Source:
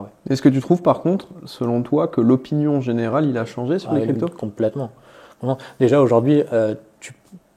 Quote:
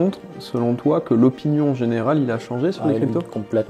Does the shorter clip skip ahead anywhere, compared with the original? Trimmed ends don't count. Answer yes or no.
no